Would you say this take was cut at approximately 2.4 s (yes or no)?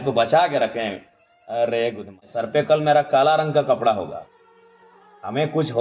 yes